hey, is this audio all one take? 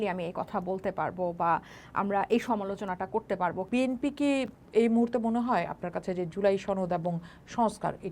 no; 1 cut; at 3.6 s

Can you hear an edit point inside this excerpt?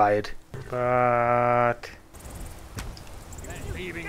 no; 0 cuts

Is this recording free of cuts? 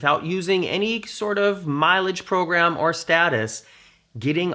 yes; 0 cuts

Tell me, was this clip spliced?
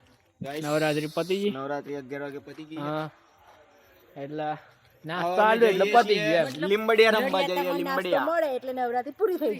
no; 0 cuts

